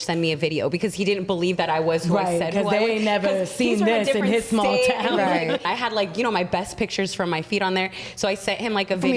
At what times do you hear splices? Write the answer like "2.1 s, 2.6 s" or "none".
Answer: 5.7 s